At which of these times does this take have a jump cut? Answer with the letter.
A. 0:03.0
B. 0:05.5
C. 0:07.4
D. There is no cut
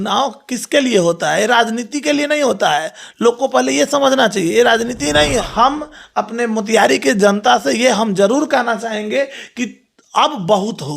B